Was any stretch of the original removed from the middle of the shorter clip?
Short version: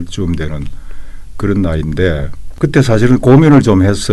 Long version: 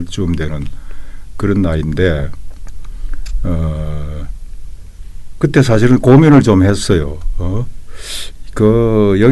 yes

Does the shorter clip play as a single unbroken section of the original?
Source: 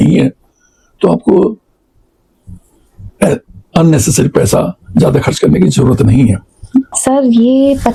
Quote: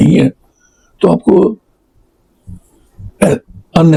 yes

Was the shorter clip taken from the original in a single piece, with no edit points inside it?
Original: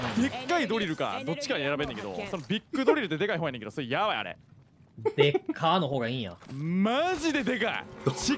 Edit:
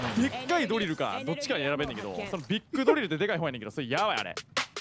yes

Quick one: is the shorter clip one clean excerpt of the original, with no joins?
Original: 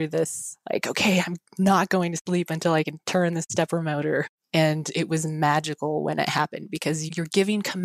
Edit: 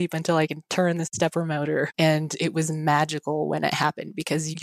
no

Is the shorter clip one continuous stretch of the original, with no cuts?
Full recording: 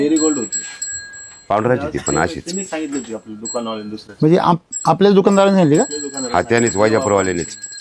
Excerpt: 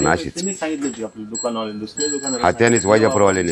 no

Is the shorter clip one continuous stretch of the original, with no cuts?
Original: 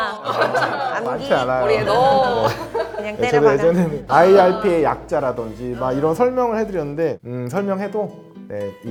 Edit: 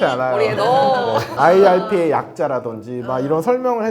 no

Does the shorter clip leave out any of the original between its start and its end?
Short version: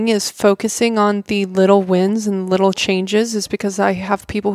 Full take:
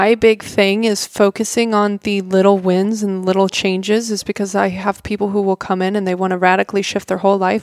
no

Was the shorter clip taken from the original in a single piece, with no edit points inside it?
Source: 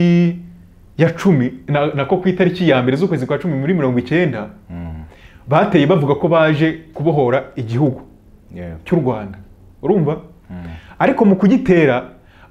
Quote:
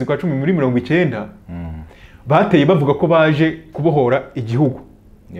yes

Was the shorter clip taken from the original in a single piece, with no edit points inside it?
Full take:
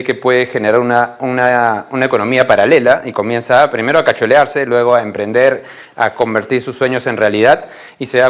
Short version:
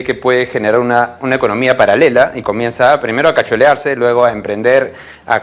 no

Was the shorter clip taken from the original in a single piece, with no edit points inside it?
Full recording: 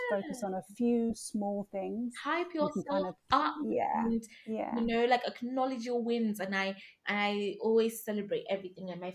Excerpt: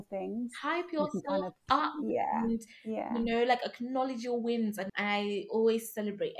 no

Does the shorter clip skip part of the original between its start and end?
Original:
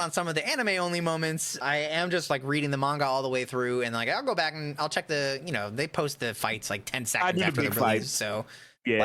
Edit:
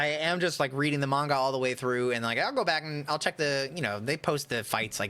no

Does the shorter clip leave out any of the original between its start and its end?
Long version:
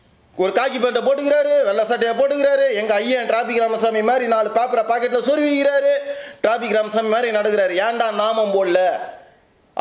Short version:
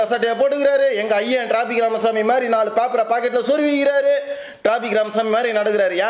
no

